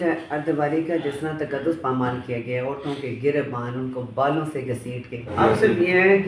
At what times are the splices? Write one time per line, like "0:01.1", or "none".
0:05.3